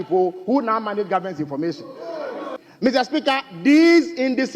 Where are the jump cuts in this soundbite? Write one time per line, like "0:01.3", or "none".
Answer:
0:02.6